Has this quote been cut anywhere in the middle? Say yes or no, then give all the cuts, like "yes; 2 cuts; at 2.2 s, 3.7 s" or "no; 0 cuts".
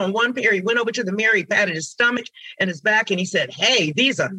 no; 0 cuts